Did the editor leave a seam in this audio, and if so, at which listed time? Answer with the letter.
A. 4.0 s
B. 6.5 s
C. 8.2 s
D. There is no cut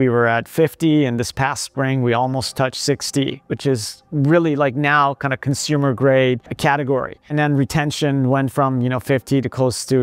D